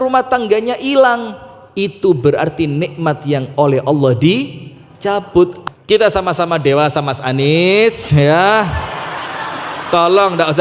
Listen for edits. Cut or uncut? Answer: cut